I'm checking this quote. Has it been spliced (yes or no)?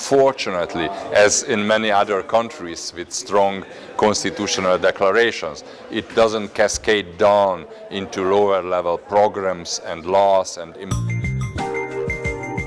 yes